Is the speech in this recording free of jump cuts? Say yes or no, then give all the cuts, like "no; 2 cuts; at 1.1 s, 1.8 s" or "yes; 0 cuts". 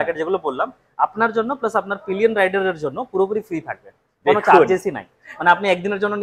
yes; 0 cuts